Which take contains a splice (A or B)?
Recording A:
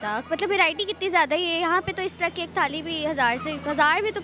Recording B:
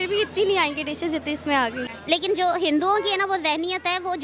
B